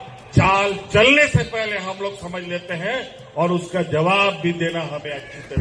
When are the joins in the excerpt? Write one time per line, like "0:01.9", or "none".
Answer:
none